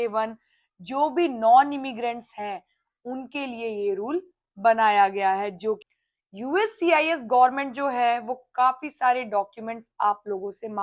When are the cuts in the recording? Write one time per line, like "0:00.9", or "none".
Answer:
0:05.8